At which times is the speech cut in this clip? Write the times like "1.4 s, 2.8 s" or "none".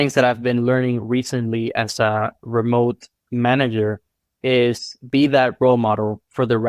none